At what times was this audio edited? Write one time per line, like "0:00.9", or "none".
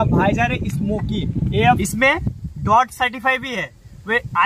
0:01.8